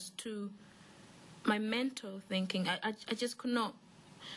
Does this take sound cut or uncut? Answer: uncut